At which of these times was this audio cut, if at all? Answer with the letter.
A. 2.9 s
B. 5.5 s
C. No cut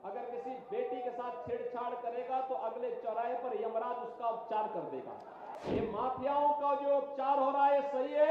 B